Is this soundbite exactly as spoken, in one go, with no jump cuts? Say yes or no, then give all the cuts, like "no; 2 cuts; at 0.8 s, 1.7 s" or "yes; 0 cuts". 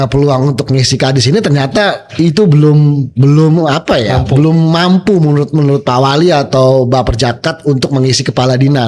yes; 0 cuts